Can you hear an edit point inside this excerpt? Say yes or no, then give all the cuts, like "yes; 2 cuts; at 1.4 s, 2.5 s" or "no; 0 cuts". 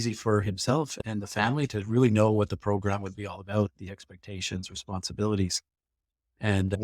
yes; 1 cut; at 1.0 s